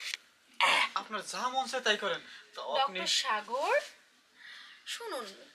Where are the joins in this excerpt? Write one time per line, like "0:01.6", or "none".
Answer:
0:01.0